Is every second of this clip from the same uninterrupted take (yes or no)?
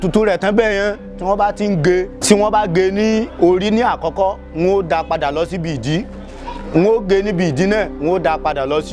no